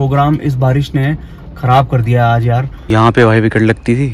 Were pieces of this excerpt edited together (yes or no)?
yes